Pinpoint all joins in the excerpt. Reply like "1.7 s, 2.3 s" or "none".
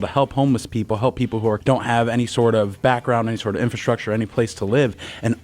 1.6 s